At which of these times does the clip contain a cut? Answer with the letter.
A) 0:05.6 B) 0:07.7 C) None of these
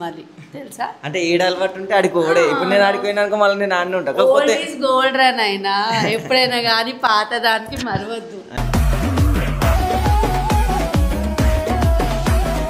C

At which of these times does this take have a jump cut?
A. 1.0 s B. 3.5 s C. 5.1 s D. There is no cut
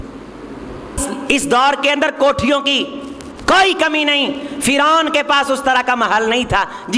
A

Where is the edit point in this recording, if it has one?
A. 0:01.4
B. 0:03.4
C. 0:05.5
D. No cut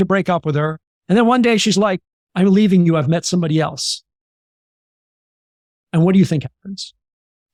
D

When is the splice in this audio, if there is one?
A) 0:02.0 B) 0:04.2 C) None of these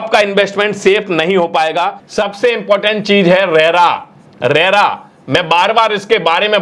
A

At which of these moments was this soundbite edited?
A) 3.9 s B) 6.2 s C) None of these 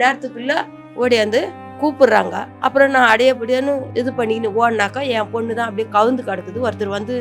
A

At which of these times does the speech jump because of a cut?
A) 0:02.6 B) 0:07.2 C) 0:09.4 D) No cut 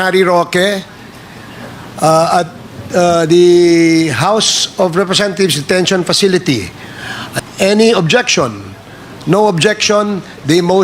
B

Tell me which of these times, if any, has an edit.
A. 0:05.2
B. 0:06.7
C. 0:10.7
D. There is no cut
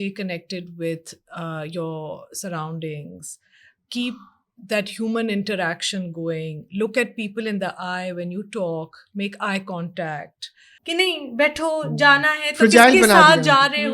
C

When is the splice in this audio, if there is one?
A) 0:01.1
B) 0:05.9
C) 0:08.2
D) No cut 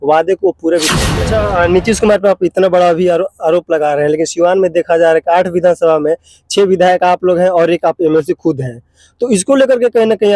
A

